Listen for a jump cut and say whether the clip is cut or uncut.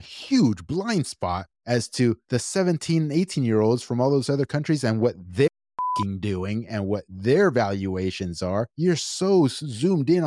cut